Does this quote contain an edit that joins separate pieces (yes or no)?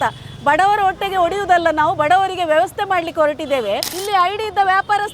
yes